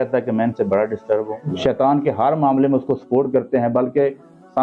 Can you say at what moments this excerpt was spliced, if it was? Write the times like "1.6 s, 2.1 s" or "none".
1.4 s